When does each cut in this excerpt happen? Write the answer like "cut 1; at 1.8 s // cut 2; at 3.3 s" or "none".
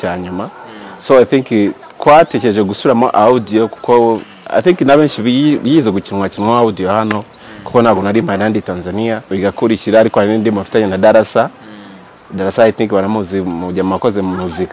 cut 1; at 9.3 s